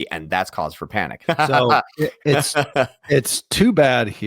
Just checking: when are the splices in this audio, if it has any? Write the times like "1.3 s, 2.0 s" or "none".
1.2 s